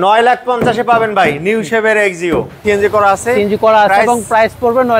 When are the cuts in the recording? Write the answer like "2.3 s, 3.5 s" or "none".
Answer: 2.6 s